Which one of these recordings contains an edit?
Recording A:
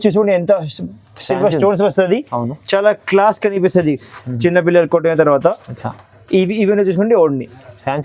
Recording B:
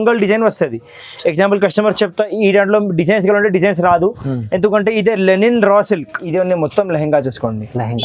B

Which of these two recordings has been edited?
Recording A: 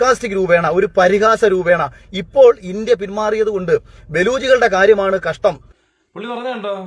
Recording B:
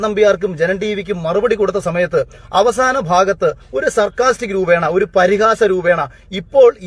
A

